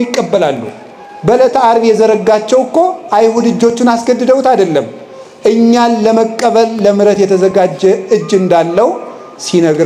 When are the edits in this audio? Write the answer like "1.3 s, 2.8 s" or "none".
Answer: none